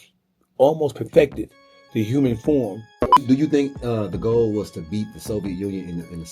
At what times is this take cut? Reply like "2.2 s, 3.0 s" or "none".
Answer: 3.2 s